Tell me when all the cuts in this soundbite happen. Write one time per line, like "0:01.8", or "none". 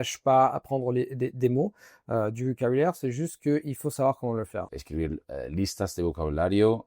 0:04.7

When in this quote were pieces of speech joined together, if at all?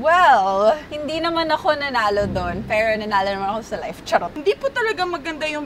0:00.9
0:04.3

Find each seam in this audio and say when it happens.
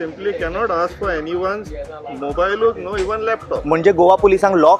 none

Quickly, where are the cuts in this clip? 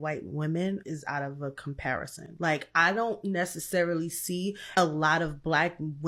none

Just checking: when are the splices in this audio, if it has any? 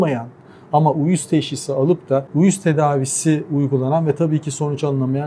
0:02.3

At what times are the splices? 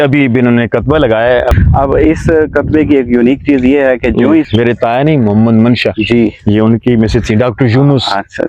0:01.6
0:04.5

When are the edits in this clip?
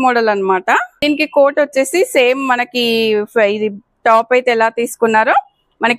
0:00.9

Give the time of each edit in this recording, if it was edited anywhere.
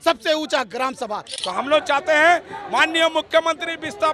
0:01.3

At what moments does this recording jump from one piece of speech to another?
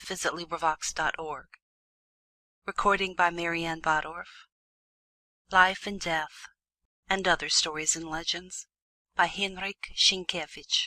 none

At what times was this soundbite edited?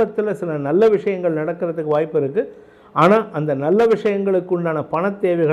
none

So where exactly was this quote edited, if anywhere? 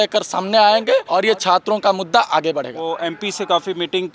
0:01.1
0:02.8

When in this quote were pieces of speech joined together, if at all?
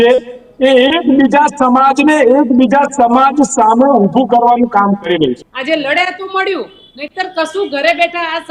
0:05.5

